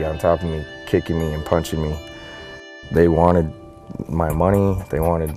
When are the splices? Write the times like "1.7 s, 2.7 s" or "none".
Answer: 2.7 s